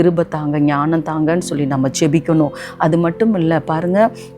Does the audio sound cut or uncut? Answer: uncut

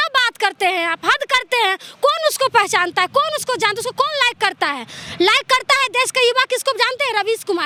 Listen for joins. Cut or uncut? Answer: uncut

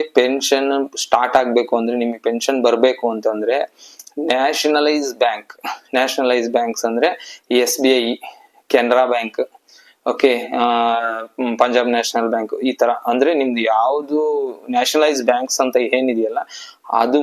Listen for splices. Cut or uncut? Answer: uncut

